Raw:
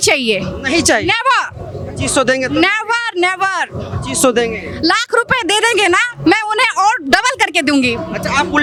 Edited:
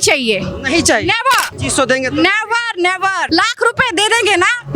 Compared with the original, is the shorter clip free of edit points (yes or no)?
no